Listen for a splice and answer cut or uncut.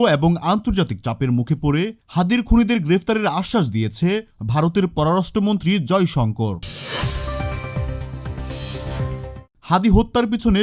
cut